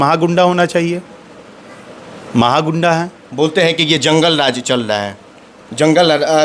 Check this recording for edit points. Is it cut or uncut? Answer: uncut